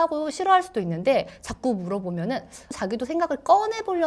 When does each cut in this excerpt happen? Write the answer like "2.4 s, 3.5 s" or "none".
2.6 s